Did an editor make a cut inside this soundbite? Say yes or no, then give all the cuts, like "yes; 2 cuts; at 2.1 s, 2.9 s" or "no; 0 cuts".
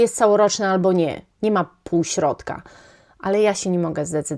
no; 0 cuts